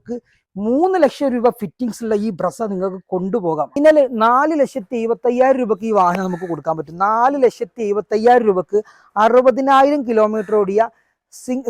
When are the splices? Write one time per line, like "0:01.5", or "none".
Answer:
0:03.7